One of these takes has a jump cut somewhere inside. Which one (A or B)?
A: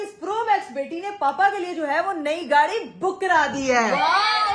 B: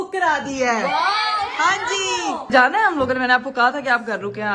B